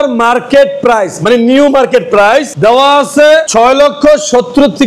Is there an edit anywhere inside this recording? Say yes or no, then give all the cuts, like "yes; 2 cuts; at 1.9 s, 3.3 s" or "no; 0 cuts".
no; 0 cuts